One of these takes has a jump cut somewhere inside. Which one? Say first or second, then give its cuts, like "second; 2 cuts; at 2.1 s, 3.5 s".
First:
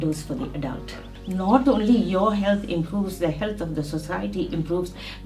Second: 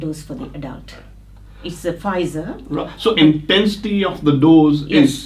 first; 1 cut; at 1.1 s